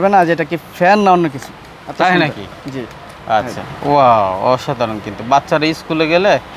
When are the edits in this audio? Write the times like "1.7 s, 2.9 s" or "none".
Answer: none

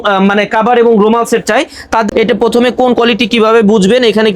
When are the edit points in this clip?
2.1 s

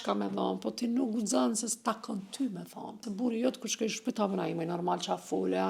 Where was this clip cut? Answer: 3.1 s

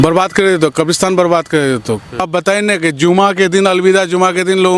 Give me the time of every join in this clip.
2.3 s

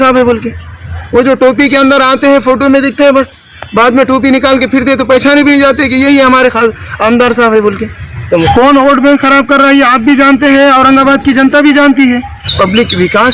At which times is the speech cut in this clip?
8.5 s, 12.4 s

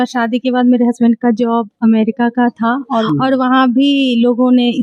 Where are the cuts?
3.0 s

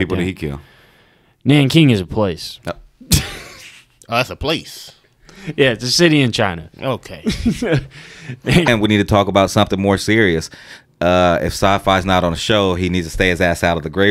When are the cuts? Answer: 8.7 s

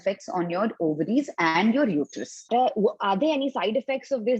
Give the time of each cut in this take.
2.5 s

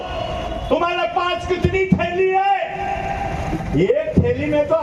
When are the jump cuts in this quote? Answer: none

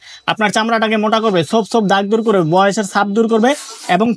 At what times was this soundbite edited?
none

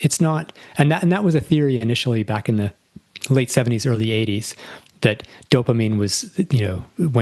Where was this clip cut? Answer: none

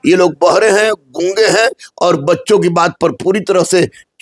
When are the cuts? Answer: none

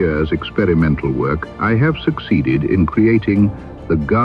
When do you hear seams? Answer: 1.5 s

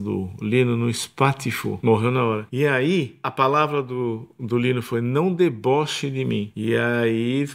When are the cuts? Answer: 1.8 s, 2.5 s, 3.3 s, 6.5 s

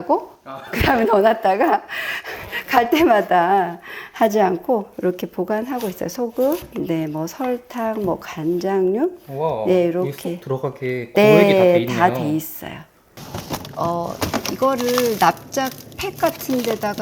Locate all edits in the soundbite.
none

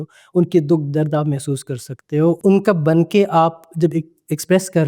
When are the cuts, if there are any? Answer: 2.4 s

